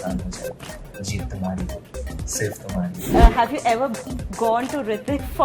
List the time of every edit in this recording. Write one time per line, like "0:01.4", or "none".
0:03.0